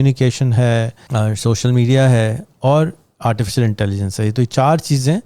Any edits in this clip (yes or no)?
yes